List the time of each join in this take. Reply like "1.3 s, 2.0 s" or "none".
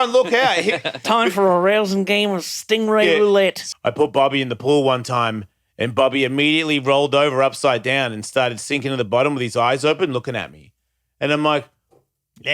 3.6 s